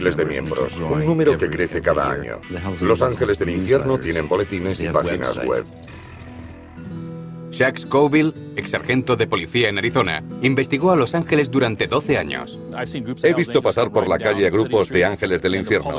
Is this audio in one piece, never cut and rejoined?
no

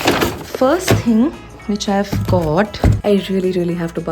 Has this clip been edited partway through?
yes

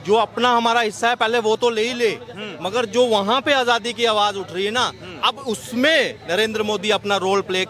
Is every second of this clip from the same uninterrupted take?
yes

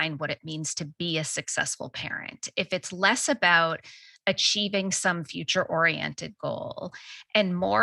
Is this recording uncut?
yes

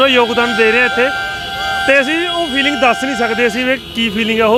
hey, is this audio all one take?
yes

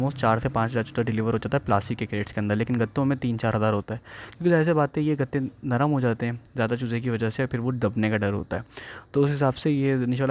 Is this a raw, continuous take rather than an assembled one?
yes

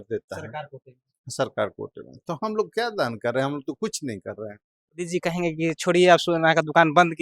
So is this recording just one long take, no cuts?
no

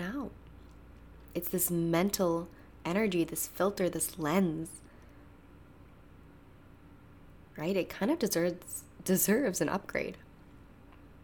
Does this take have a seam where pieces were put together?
no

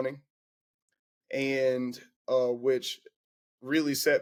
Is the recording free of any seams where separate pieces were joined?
yes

